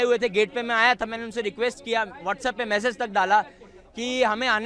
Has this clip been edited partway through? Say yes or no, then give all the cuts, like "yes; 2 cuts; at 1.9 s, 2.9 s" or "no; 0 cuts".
no; 0 cuts